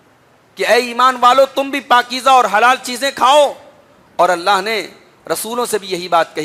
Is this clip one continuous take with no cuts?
yes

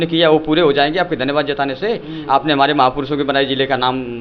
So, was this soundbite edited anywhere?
no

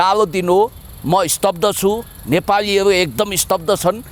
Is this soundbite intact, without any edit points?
yes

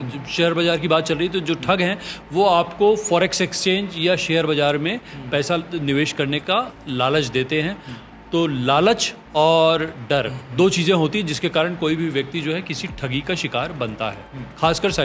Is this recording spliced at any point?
no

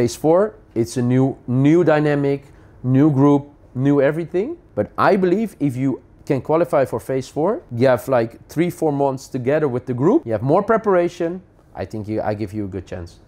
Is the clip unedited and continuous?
no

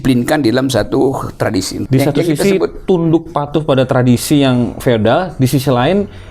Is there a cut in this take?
yes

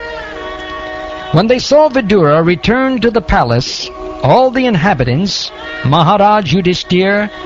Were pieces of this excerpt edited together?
yes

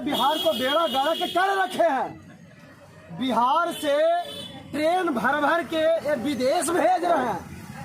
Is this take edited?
no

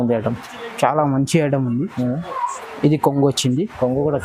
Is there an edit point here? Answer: no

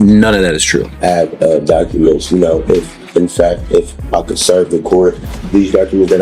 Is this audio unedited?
no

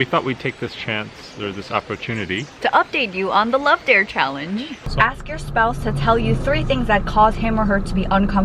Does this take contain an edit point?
yes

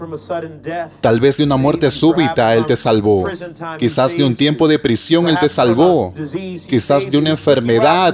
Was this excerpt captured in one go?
no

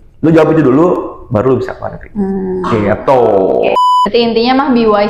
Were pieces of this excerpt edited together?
yes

